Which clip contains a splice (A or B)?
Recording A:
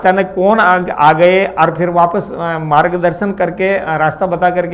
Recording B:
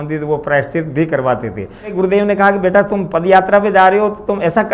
B